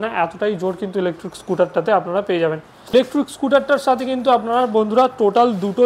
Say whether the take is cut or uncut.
cut